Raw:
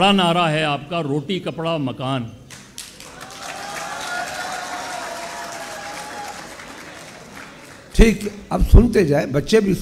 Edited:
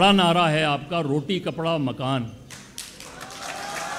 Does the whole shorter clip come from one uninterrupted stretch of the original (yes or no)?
yes